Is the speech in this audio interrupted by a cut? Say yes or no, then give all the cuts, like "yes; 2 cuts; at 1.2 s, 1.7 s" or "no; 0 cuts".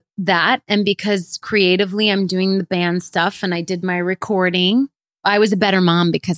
no; 0 cuts